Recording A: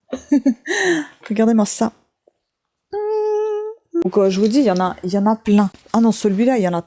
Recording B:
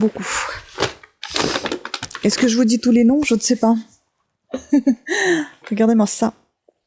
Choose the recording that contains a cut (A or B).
A